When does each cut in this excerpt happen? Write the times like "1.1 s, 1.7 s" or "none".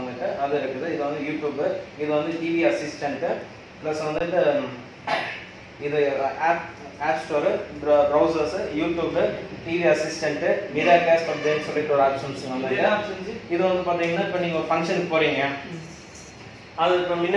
none